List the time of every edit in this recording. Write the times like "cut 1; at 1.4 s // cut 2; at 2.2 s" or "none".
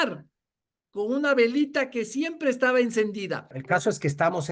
cut 1; at 3.5 s